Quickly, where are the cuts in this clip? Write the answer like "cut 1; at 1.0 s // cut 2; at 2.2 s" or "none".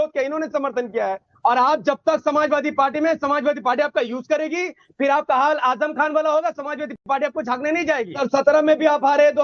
cut 1; at 1.3 s // cut 2; at 8.2 s